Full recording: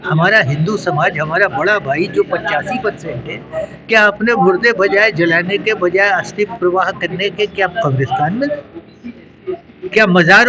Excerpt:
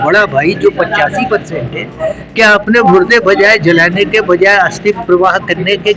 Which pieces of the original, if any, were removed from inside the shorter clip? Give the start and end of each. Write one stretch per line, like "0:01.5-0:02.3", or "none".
none

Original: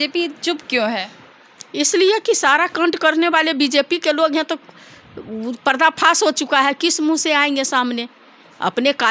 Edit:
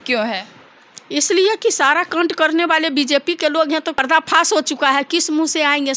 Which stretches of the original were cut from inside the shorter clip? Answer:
0:04.6-0:05.7

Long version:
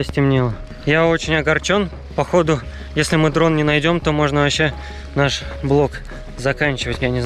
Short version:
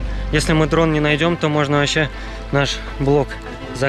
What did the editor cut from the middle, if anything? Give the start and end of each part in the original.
none

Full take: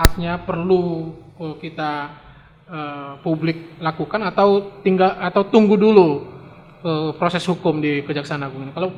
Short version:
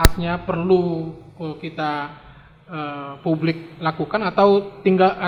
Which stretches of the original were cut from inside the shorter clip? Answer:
none

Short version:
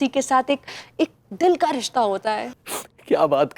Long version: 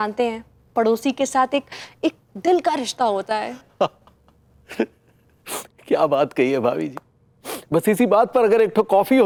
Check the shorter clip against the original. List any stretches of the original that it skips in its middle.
0:03.6-0:05.4

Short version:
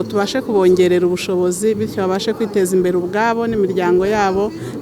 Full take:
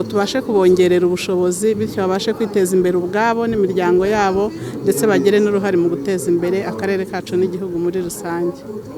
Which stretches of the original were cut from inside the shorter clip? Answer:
none

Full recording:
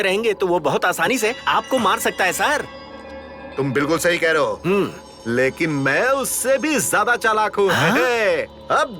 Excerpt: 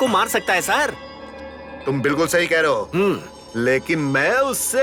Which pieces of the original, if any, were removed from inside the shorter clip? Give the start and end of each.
none

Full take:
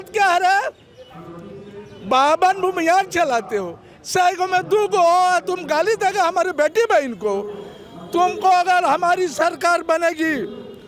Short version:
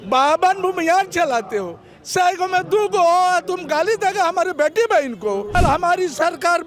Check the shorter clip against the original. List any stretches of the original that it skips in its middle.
0:07.5-0:08.7

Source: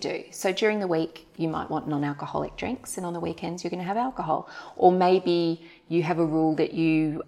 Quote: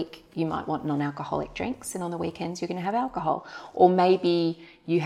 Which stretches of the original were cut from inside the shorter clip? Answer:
none

